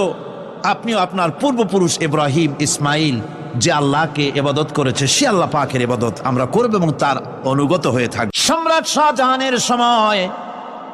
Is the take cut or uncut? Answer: cut